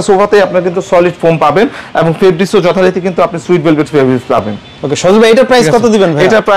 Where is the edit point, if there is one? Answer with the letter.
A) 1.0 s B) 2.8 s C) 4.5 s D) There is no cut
D